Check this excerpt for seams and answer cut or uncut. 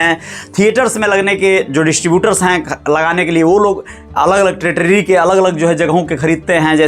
uncut